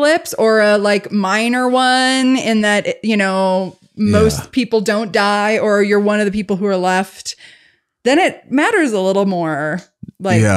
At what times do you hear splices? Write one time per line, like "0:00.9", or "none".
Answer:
none

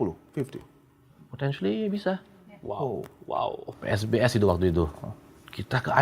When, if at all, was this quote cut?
0:03.8

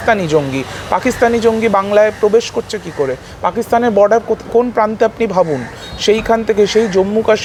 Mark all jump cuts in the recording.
none

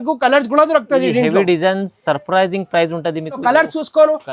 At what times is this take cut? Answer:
0:03.4

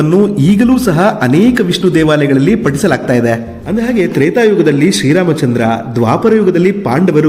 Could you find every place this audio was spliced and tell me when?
0:03.6

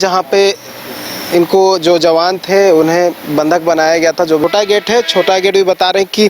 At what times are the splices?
0:04.4

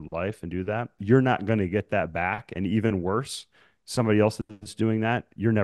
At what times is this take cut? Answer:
0:00.9

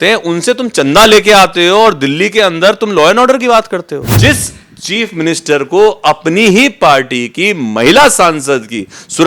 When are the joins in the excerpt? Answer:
0:04.0

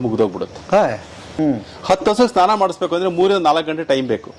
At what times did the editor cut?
0:01.3

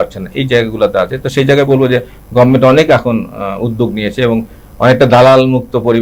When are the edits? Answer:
none

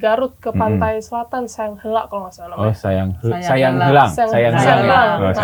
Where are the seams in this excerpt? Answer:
none

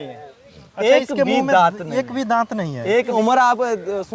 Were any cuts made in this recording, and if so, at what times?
0:03.1

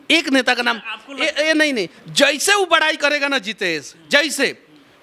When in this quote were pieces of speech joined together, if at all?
0:02.0

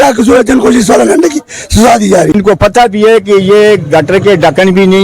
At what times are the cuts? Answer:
0:02.3

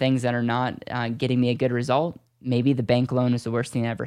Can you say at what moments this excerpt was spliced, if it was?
none

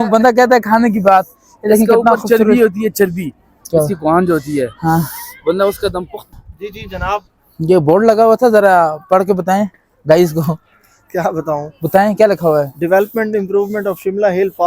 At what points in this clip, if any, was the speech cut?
0:06.4

